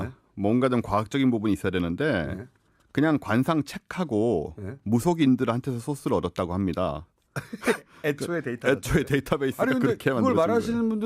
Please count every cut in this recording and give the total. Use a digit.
1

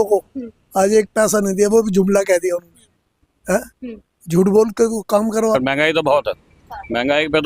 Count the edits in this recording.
1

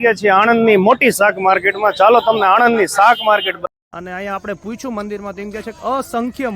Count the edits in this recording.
1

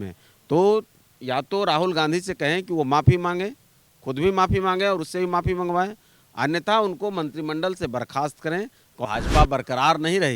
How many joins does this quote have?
1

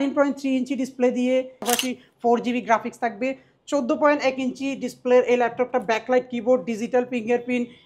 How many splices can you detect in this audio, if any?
1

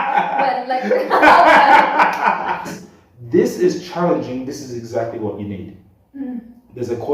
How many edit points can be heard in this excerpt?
1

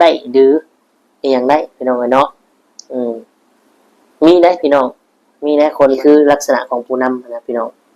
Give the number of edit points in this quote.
1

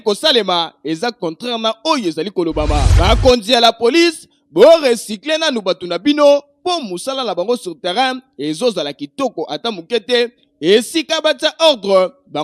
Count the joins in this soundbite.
1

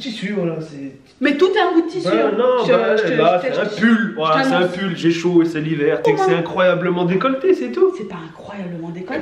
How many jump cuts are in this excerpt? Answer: 0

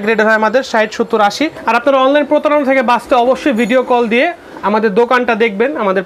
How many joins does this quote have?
1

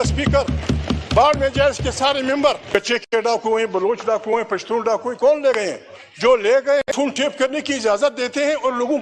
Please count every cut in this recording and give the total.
2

